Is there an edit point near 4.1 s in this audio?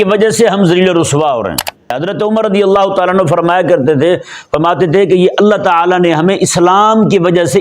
no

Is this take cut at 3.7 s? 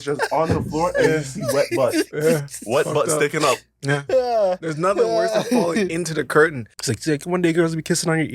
no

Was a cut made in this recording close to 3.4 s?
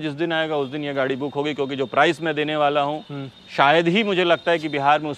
no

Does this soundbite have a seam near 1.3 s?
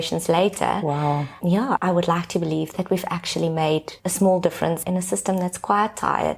no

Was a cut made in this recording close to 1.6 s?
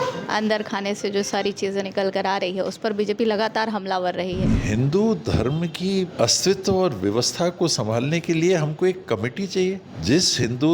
no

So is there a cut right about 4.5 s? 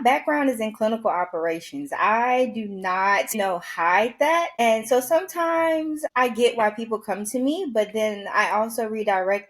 yes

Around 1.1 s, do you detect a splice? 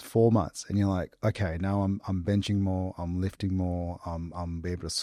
no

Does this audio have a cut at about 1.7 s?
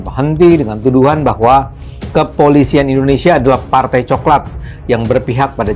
no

